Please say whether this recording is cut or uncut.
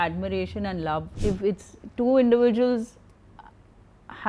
cut